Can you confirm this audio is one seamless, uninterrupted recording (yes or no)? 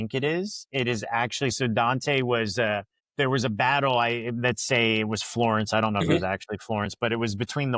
no